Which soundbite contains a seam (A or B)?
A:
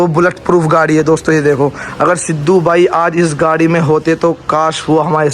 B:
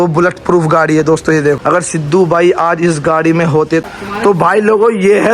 B